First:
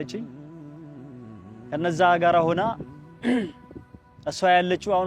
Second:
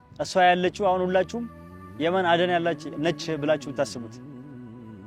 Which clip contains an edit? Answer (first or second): second